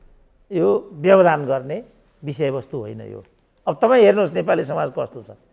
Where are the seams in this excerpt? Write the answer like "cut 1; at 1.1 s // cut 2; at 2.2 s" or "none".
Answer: none

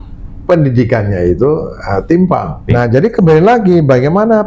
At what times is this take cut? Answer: cut 1; at 2.6 s

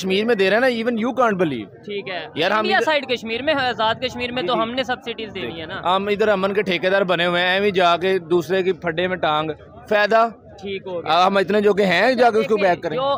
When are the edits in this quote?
none

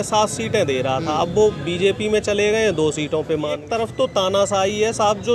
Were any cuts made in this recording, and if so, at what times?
cut 1; at 3.6 s

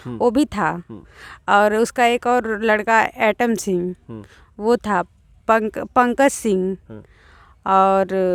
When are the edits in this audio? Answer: none

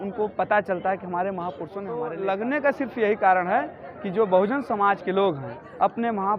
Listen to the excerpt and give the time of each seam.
cut 1; at 2.1 s

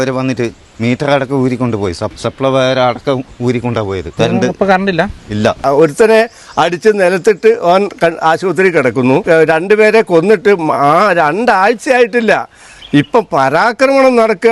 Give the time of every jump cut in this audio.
cut 1; at 2.1 s // cut 2; at 4.0 s // cut 3; at 5.6 s // cut 4; at 9.2 s

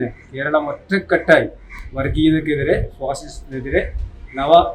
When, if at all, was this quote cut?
none

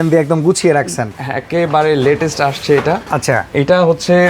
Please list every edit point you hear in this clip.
none

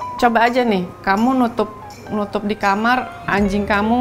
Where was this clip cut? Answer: cut 1; at 0.9 s

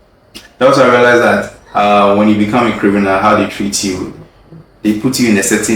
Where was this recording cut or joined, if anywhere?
none

